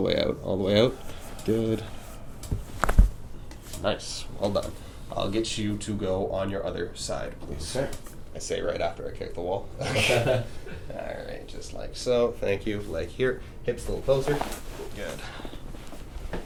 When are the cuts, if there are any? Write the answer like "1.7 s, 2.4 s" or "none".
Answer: none